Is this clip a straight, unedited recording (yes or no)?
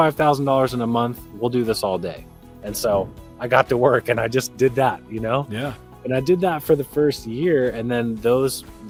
yes